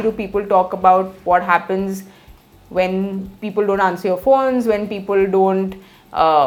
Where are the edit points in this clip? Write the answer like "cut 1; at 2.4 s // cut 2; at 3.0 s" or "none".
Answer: none